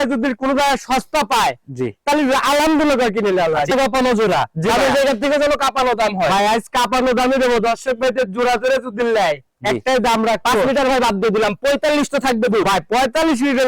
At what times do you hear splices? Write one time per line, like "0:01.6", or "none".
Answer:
0:03.7